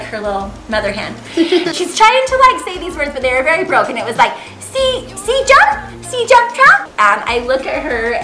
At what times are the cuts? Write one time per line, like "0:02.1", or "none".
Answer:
0:01.7
0:06.9